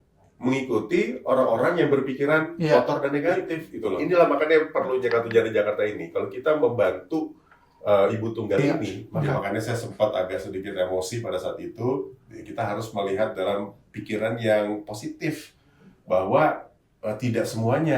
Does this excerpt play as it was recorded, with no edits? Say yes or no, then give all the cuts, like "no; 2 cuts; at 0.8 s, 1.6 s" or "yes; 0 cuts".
no; 2 cuts; at 4.0 s, 9.3 s